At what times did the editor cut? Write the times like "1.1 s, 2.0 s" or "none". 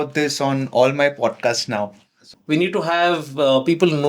2.2 s

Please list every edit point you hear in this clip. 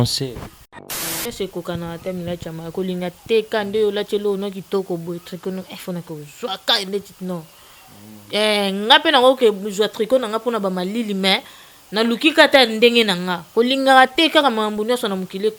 1.0 s

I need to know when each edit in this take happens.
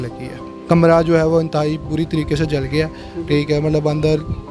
none

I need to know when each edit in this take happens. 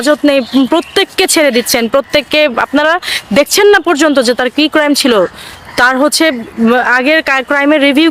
none

